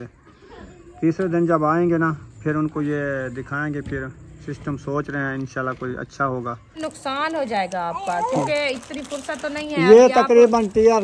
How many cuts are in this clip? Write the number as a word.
one